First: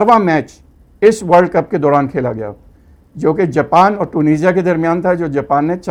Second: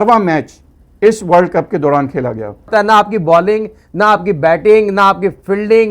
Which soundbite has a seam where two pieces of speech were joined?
second; 1 cut; at 2.7 s

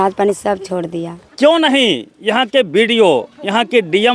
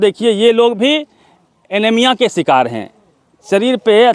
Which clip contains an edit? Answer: first; 1 cut; at 1.3 s

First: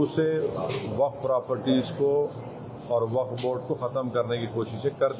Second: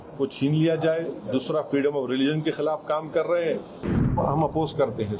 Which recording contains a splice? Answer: second; 1 cut; at 4.1 s

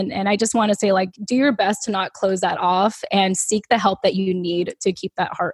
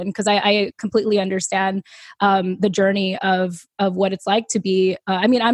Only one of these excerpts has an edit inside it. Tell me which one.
first; 1 cut; at 1.2 s

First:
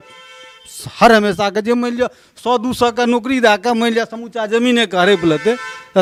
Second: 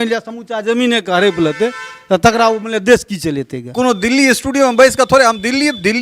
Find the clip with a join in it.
second; 1 cut; at 3.6 s

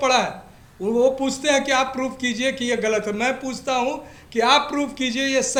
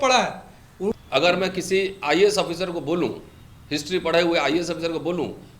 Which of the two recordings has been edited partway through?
second; 1 cut; at 0.9 s

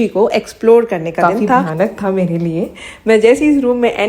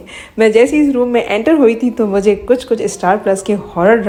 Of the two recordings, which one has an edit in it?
first; 1 cut; at 1.7 s

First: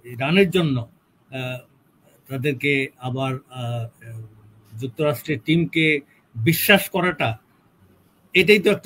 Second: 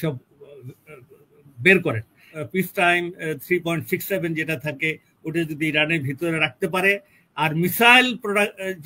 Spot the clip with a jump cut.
second; 1 cut; at 2.3 s

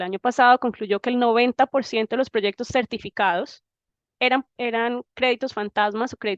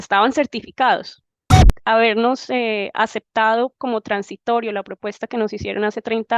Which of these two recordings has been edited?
second; 1 cut; at 1.7 s

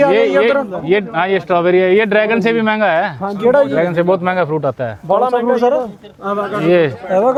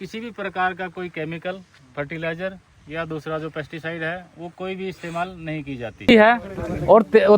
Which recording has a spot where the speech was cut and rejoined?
second; 1 cut; at 6.1 s

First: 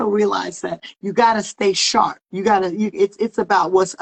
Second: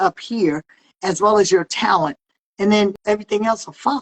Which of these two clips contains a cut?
second; 1 cut; at 2.9 s

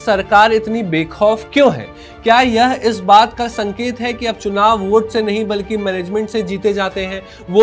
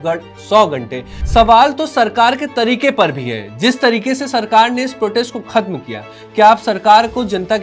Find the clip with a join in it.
second; 1 cut; at 1.1 s

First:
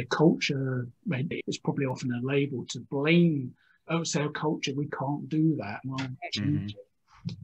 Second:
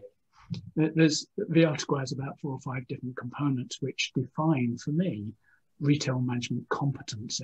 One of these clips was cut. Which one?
first; 2 cuts; at 1.3 s, 3.8 s

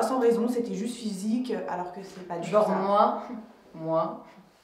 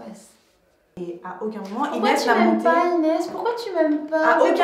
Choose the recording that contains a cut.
second; 1 cut; at 0.9 s

